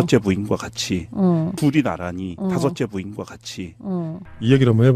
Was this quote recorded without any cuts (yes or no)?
no